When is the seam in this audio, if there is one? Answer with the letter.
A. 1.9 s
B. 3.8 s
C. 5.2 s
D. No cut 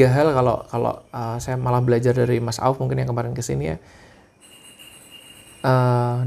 D